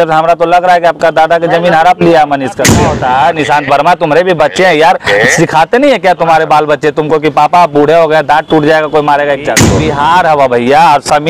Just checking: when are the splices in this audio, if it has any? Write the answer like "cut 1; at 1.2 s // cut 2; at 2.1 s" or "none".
cut 1; at 2.9 s // cut 2; at 9.7 s